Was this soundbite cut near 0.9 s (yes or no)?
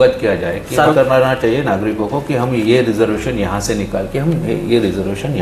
yes